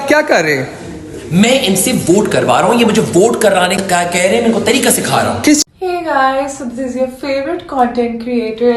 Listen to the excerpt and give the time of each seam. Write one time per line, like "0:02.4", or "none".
0:05.6